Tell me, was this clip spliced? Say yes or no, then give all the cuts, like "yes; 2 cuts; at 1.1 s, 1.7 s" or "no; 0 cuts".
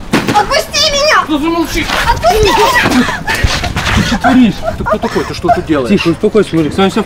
no; 0 cuts